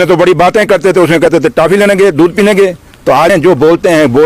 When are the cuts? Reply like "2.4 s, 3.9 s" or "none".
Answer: 3.3 s